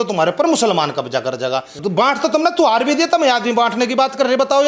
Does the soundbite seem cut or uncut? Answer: cut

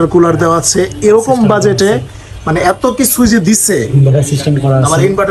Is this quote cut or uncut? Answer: uncut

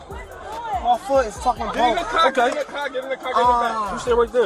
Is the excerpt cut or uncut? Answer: uncut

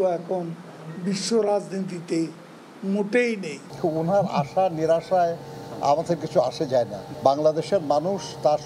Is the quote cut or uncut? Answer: cut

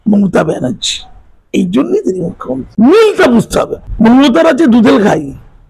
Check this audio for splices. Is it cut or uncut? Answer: cut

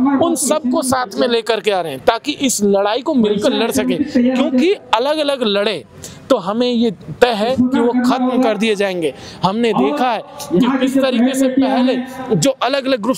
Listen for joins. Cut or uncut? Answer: uncut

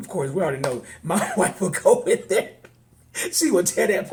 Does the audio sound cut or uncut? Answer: uncut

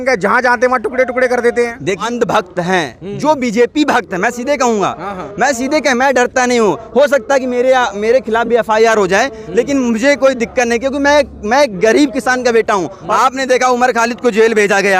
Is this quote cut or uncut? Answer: cut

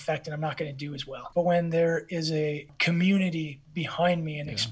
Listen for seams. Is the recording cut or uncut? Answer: cut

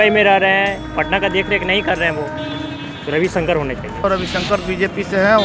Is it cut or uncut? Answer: cut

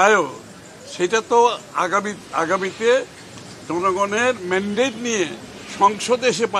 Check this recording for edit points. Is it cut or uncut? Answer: uncut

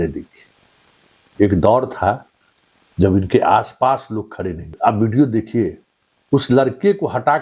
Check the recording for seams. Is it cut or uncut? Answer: cut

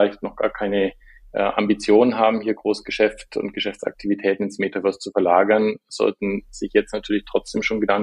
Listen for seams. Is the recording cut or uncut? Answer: uncut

